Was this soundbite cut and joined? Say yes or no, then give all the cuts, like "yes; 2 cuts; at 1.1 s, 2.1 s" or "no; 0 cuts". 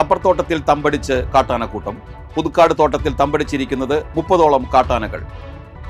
no; 0 cuts